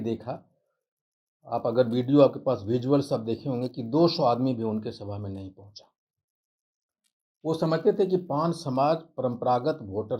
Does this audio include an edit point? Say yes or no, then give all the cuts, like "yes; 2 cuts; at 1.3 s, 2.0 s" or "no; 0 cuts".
no; 0 cuts